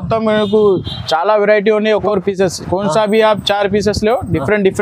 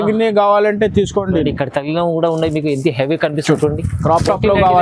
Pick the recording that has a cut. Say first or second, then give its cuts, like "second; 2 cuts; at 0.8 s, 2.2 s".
first; 1 cut; at 2.1 s